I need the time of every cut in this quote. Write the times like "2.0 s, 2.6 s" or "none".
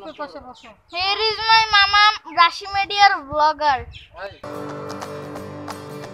none

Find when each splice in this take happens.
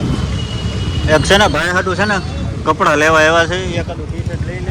none

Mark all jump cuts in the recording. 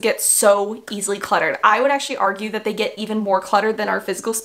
none

